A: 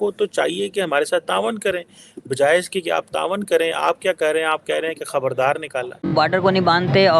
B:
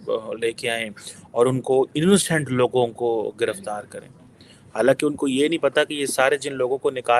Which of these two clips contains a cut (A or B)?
A